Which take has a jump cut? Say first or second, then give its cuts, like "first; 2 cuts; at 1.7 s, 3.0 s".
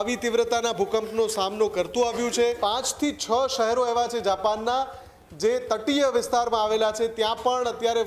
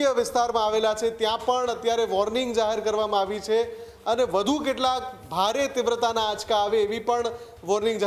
first; 1 cut; at 2.6 s